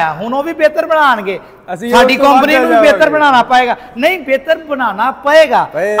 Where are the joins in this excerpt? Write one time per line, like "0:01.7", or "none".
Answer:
none